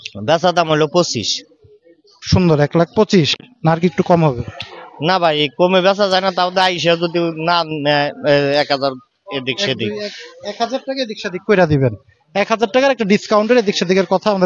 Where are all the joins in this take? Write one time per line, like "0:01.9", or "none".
none

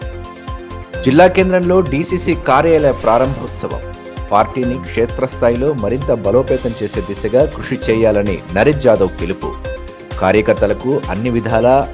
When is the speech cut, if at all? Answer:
0:01.0

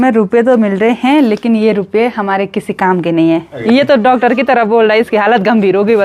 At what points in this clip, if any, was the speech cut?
0:03.6

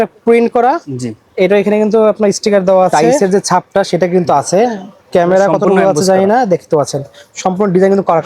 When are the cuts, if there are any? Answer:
0:02.9

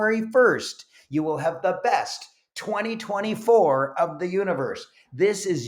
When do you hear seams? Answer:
none

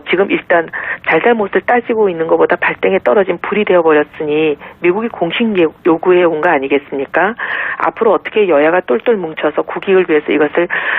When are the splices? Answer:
0:06.1

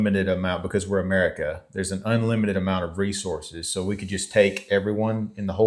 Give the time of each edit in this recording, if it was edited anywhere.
none

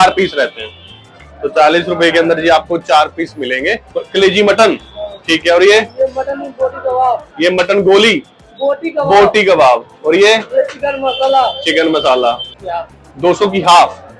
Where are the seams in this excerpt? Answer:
0:03.9
0:12.5

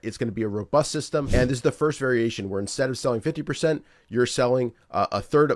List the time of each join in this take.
0:01.3

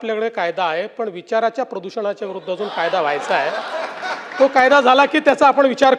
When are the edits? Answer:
none

